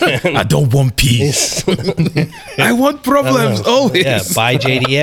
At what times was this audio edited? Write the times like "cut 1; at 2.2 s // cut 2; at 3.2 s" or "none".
none